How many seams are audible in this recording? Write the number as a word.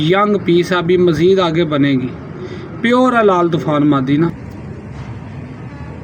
one